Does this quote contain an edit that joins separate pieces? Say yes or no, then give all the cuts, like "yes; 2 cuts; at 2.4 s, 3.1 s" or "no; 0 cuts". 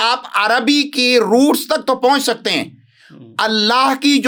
no; 0 cuts